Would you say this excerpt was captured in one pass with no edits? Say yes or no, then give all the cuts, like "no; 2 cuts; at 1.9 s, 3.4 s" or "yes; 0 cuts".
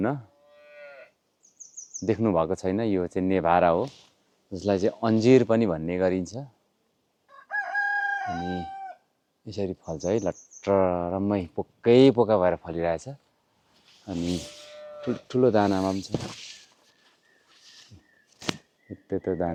yes; 0 cuts